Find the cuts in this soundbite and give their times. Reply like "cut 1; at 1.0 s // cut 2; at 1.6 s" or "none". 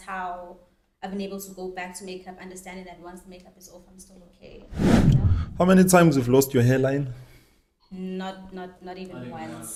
none